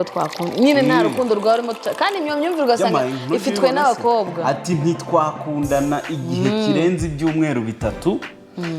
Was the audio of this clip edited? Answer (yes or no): no